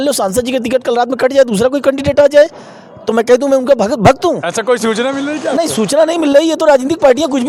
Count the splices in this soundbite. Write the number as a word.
zero